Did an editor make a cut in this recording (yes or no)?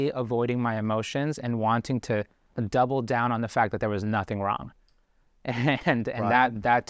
no